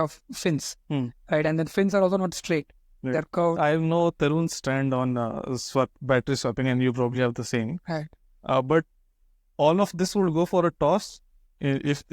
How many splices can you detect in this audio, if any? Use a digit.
1